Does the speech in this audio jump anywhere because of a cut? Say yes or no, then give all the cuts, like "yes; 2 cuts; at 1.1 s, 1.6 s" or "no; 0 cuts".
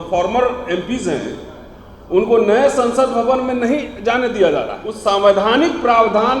yes; 1 cut; at 4.8 s